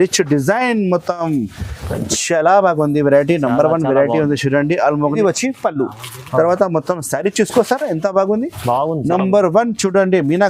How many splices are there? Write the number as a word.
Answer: one